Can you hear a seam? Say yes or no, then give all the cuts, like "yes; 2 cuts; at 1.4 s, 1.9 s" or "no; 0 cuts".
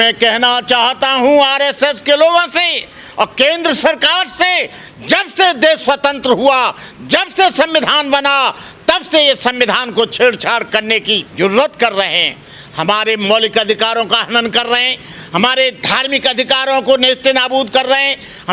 no; 0 cuts